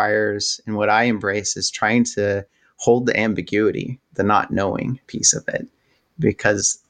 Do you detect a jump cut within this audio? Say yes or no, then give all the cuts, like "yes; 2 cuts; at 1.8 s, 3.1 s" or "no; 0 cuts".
yes; 1 cut; at 5.3 s